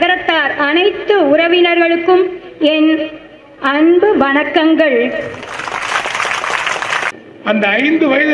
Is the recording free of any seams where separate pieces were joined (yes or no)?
no